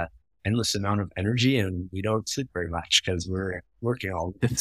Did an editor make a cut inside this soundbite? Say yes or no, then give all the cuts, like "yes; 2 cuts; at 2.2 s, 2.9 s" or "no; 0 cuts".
no; 0 cuts